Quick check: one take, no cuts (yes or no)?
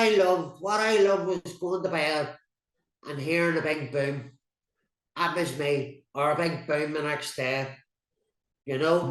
yes